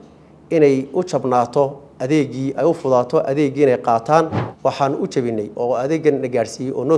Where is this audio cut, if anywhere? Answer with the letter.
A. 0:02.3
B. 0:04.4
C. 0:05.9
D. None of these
B